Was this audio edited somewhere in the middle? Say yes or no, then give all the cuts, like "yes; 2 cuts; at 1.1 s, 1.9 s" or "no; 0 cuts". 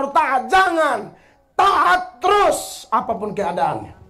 no; 0 cuts